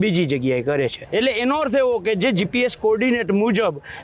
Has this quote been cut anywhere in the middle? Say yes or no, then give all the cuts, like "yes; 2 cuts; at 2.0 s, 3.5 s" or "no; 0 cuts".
yes; 1 cut; at 1.0 s